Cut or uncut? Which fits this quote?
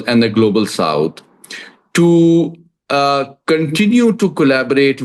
uncut